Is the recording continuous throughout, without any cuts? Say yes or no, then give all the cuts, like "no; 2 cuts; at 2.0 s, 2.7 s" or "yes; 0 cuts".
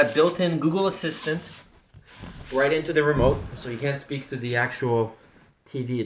yes; 0 cuts